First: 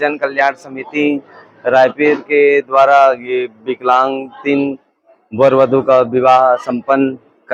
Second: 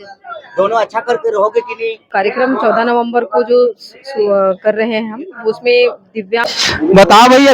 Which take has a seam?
second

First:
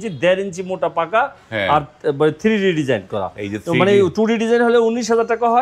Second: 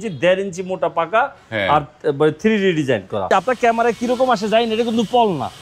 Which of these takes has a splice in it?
second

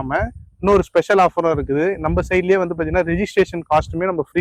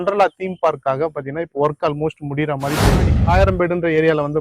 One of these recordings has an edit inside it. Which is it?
second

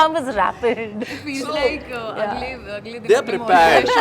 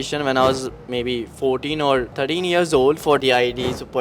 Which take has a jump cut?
second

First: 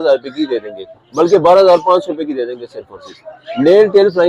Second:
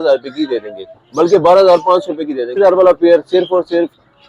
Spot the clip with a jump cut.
second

